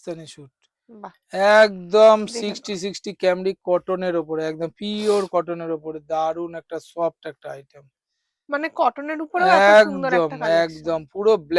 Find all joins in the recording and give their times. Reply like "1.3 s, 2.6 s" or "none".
none